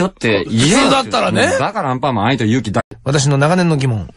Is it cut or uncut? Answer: uncut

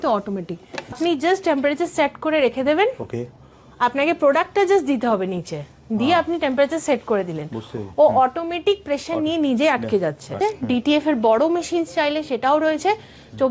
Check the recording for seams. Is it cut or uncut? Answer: cut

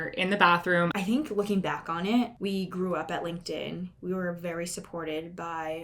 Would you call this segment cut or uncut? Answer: cut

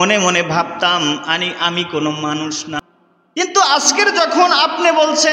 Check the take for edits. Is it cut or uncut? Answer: cut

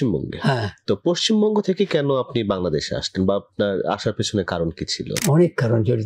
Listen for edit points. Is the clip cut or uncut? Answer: uncut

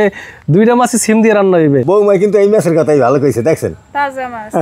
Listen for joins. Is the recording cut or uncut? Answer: cut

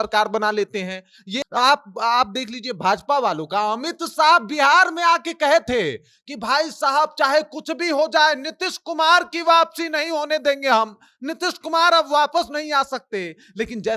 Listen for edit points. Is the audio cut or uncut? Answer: cut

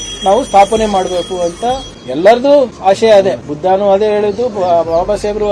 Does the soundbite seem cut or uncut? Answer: cut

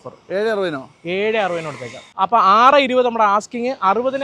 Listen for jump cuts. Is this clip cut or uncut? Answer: cut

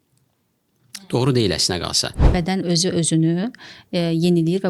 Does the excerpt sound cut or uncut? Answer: cut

